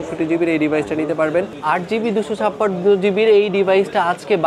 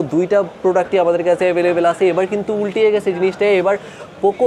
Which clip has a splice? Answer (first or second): first